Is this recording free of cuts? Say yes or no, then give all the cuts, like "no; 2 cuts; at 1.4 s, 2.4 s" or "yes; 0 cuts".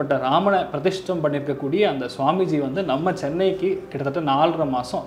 yes; 0 cuts